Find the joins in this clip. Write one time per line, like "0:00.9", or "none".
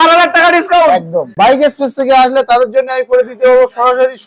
0:01.2